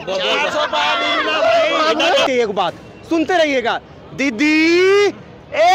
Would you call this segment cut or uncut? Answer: cut